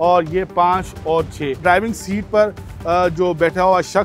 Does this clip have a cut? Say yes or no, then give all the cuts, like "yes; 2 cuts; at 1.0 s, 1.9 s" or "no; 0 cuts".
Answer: yes; 1 cut; at 1.6 s